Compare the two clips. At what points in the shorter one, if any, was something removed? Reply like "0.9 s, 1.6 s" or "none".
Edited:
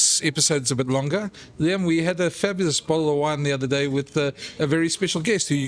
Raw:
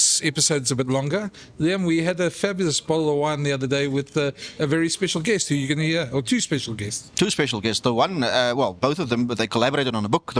none